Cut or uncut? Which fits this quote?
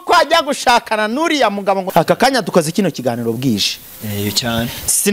cut